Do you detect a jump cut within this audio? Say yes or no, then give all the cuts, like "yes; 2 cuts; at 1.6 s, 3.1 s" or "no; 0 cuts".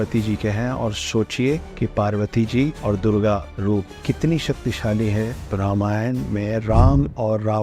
yes; 4 cuts; at 1.7 s, 2.8 s, 3.6 s, 5.5 s